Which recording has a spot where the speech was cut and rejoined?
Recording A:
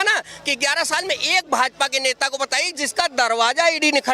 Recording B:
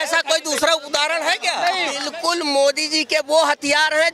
B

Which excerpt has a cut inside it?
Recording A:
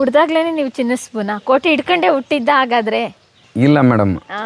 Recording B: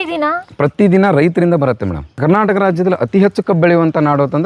B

